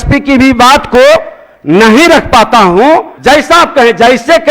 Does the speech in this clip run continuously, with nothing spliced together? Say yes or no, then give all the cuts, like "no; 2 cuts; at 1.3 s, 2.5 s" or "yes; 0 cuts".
no; 1 cut; at 3.1 s